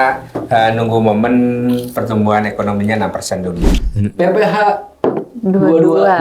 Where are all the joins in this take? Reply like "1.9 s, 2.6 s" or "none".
3.8 s